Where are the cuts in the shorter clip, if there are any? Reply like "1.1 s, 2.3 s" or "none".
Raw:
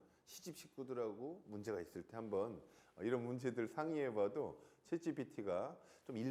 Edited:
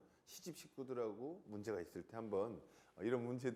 none